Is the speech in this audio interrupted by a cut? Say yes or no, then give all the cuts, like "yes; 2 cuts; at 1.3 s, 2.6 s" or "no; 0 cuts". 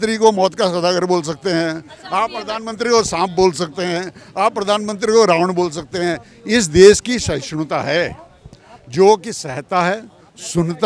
no; 0 cuts